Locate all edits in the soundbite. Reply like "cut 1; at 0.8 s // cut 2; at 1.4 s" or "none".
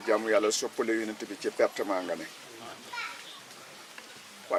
none